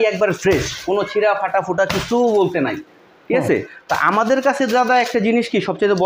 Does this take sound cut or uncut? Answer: uncut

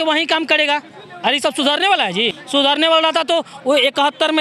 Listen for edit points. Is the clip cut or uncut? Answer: cut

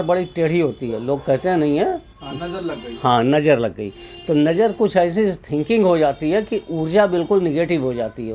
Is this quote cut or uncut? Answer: uncut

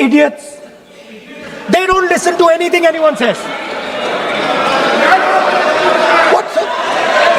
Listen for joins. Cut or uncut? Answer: uncut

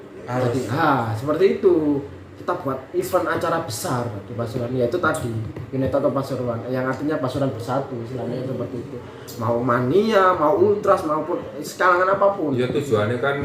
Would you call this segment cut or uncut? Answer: uncut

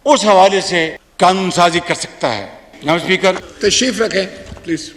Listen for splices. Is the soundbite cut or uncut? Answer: cut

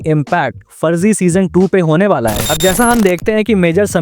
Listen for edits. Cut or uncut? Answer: cut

